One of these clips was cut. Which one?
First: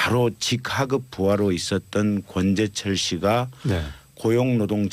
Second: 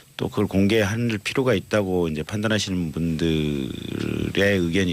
second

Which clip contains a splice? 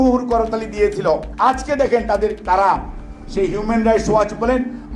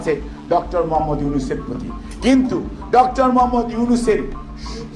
first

